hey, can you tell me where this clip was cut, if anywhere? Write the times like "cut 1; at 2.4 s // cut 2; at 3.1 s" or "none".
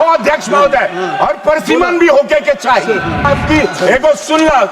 cut 1; at 3.3 s